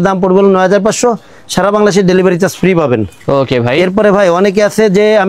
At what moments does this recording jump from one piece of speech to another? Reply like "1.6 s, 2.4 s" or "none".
none